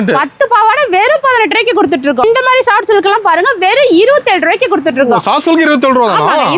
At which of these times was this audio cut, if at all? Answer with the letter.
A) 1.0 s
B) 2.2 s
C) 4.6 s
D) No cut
B